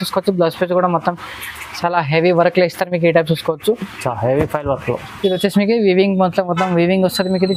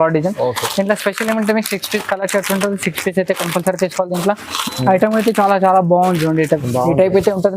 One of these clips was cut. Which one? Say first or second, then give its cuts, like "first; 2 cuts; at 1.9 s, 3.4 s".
second; 1 cut; at 6.7 s